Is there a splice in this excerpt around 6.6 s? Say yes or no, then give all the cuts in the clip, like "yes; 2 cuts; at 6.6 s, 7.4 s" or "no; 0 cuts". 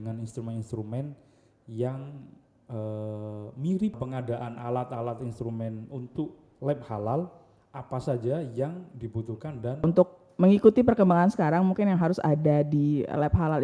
no; 2 cuts; at 3.9 s, 9.8 s